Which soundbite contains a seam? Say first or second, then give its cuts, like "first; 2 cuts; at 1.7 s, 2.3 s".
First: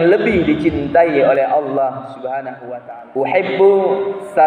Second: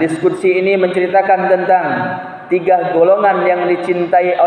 first; 1 cut; at 2.5 s